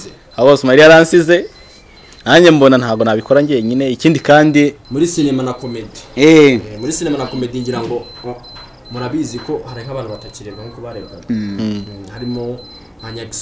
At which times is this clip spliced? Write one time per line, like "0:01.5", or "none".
0:04.8